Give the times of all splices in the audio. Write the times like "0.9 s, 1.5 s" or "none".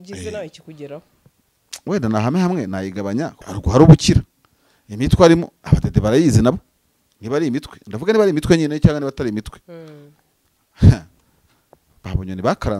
3.4 s